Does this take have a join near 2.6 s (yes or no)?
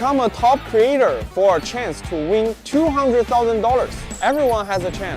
yes